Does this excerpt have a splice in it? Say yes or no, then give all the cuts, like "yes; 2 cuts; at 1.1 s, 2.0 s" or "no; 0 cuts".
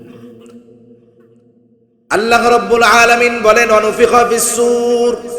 yes; 1 cut; at 1.4 s